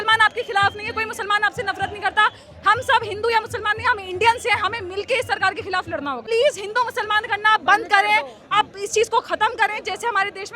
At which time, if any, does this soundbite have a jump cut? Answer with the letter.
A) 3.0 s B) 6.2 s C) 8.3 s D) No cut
B